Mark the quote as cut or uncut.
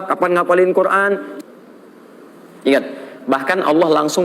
cut